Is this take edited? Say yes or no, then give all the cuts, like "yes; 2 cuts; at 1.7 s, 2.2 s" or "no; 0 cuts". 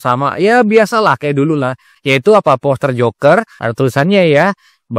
yes; 1 cut; at 3.6 s